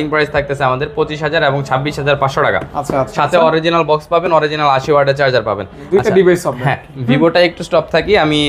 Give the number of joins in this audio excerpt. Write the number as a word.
zero